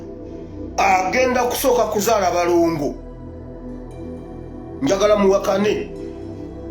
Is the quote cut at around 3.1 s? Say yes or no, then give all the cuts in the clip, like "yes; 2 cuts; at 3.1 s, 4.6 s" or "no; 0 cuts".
no; 0 cuts